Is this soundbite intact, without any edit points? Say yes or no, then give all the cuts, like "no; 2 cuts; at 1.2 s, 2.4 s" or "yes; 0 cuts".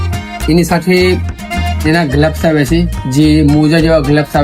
yes; 0 cuts